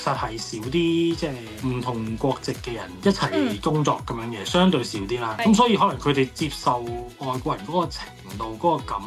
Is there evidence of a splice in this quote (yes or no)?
no